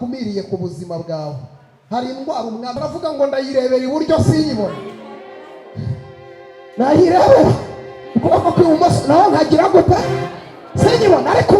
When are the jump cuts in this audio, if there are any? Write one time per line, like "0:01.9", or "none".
0:02.7